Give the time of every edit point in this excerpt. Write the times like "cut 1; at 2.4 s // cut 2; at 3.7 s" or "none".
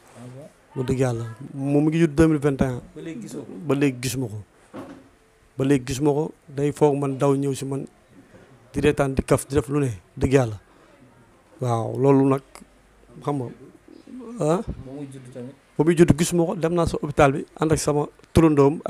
none